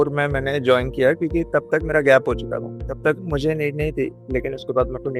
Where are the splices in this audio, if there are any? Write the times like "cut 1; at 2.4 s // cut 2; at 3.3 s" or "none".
none